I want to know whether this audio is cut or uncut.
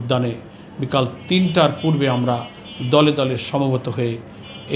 uncut